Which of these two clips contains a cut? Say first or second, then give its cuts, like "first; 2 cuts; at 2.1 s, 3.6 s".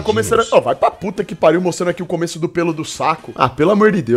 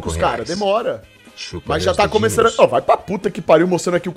first; 1 cut; at 3.3 s